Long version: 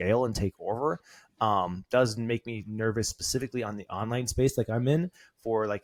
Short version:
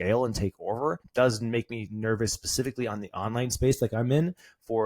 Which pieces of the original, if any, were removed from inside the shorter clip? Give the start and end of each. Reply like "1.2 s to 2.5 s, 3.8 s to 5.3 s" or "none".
1.0 s to 1.8 s